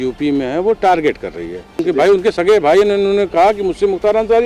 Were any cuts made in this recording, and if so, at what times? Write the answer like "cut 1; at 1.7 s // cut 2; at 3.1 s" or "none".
cut 1; at 1.8 s

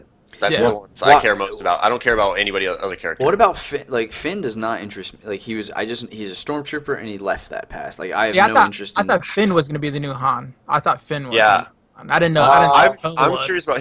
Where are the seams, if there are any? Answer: cut 1; at 8.5 s

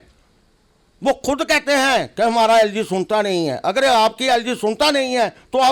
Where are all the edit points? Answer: none

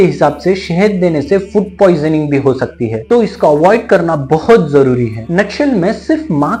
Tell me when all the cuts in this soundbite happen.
none

